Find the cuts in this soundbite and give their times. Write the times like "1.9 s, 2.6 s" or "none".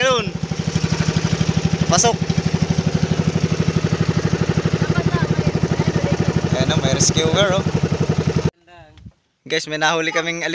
8.5 s